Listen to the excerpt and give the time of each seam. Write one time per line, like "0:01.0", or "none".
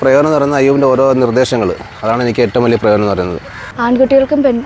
0:03.5